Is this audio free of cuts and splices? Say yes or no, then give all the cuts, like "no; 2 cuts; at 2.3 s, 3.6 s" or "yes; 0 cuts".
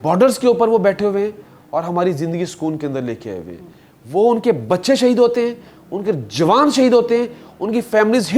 yes; 0 cuts